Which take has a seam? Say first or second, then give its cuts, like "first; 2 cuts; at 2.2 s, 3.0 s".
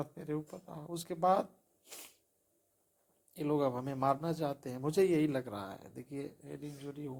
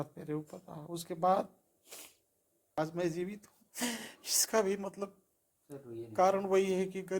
second; 1 cut; at 2.7 s